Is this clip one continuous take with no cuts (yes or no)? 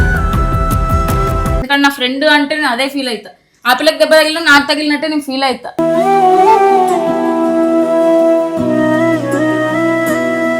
no